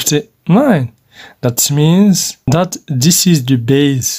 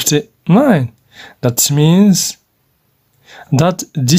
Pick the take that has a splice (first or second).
first